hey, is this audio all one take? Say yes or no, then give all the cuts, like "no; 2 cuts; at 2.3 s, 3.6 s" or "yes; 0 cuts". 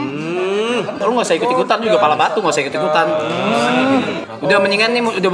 no; 2 cuts; at 1.0 s, 4.2 s